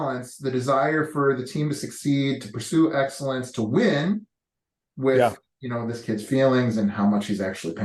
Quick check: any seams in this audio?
no; 0 cuts

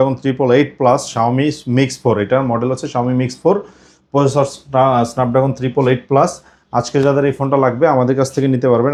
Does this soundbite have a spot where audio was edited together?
no; 0 cuts

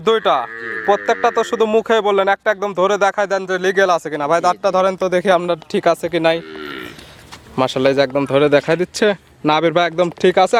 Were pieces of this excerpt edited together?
no; 0 cuts

